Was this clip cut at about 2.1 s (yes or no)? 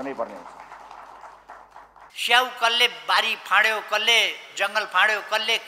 yes